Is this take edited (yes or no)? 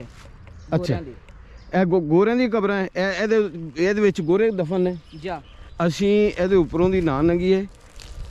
yes